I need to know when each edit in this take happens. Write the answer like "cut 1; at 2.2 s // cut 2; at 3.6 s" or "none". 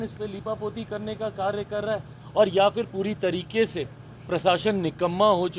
none